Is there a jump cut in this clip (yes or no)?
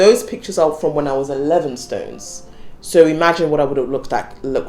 no